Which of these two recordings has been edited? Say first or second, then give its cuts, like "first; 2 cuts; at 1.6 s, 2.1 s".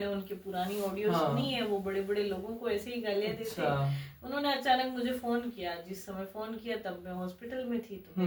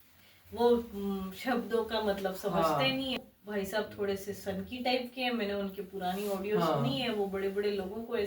second; 1 cut; at 3.2 s